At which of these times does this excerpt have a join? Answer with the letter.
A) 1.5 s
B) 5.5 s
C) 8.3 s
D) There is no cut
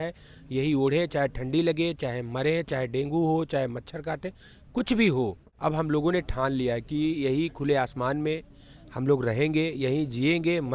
B